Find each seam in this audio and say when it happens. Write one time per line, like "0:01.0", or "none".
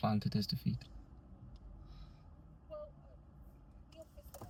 none